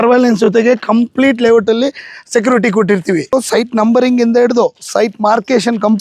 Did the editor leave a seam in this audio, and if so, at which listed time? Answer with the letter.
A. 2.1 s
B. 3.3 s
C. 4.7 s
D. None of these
B